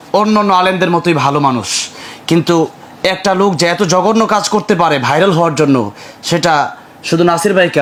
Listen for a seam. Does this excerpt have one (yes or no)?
no